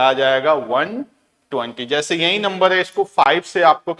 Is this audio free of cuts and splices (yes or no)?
yes